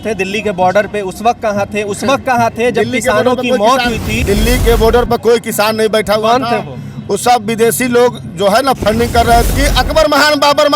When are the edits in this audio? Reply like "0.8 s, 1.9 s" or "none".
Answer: 4.1 s, 9.5 s